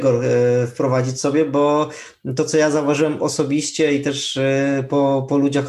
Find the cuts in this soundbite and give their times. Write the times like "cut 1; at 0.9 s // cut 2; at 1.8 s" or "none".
none